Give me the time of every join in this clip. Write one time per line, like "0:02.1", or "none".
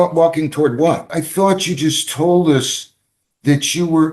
0:01.1